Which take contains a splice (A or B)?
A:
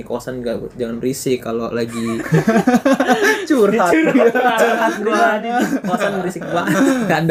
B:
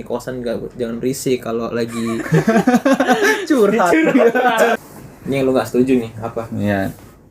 B